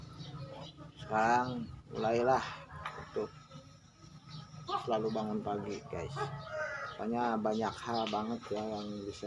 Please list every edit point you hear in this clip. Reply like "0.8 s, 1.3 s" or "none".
6.4 s